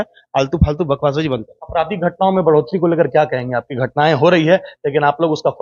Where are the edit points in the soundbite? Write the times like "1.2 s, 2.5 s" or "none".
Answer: none